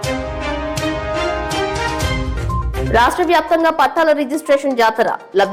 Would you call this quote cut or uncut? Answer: uncut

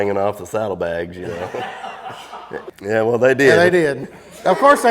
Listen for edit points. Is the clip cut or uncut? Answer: cut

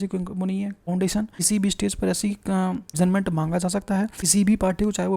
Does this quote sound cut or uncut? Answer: cut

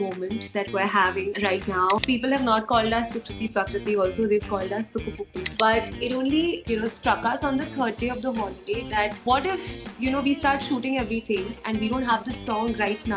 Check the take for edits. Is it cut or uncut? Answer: cut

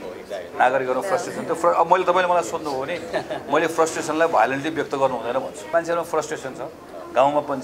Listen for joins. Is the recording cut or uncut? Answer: cut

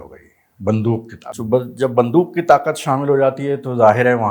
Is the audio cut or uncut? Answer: cut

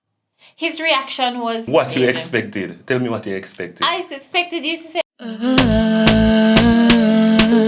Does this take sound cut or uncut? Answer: cut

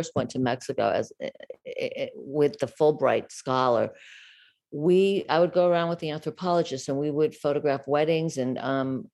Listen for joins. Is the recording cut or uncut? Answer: uncut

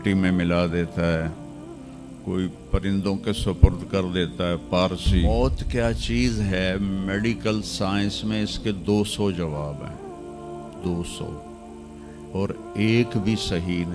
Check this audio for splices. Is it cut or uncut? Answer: cut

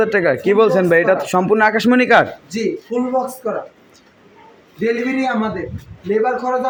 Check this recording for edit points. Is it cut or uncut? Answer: uncut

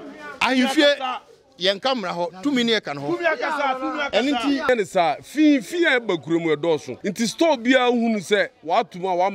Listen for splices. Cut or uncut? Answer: cut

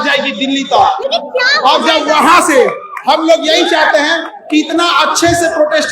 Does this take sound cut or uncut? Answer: uncut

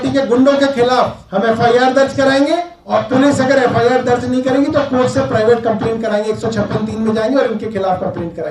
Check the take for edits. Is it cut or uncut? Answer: cut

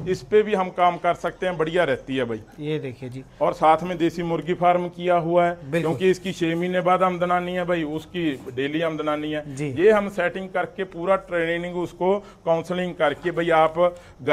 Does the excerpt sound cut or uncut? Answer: uncut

